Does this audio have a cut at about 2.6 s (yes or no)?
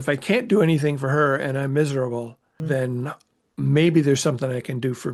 yes